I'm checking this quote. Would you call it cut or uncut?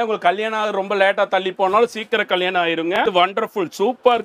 cut